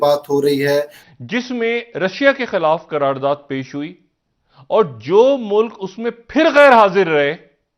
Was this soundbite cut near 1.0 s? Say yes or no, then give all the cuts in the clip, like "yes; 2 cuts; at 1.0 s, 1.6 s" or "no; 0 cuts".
yes; 1 cut; at 1.0 s